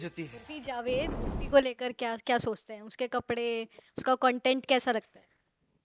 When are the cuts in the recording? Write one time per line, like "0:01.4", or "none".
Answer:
0:01.0